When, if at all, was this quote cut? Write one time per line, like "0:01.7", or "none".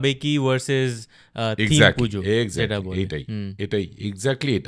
none